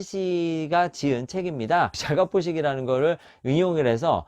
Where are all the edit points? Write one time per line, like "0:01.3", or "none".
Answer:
0:02.0